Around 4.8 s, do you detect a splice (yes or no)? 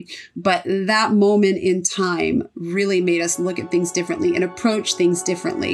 no